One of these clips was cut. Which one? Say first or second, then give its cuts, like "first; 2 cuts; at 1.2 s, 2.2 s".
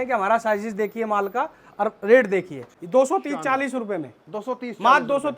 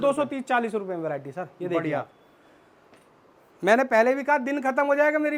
first; 1 cut; at 2.6 s